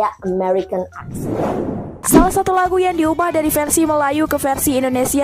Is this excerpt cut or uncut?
cut